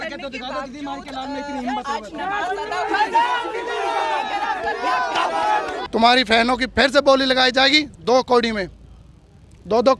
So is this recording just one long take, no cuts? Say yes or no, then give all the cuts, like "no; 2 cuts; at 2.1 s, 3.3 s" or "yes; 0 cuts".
yes; 0 cuts